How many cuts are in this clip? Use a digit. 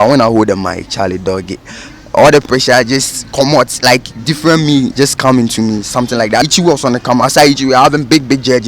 1